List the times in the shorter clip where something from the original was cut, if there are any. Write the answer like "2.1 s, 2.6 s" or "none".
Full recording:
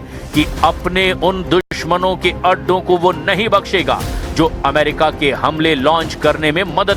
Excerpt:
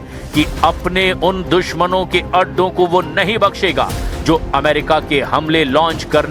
1.7 s